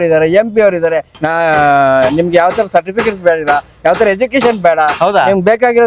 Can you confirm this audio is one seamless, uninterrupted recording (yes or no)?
no